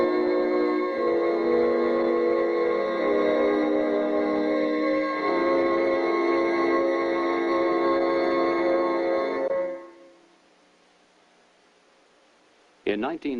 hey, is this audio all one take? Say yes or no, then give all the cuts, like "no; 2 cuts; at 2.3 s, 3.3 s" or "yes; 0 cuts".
yes; 0 cuts